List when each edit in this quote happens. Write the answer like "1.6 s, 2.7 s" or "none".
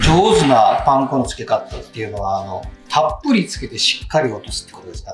none